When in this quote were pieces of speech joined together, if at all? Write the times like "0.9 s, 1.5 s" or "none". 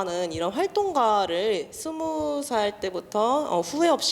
none